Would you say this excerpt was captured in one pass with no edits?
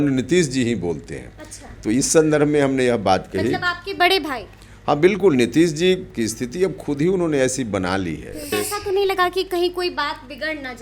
no; 1 cut; at 8.5 s

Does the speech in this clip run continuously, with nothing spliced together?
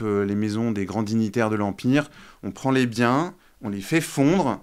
yes; 0 cuts

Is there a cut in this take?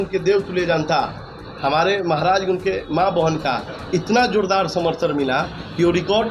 no; 0 cuts

